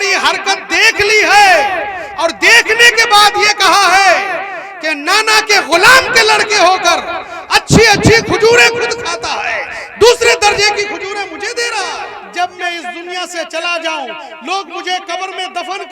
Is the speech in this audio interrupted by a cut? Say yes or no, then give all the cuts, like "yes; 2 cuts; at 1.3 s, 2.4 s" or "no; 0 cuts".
yes; 1 cut; at 12.2 s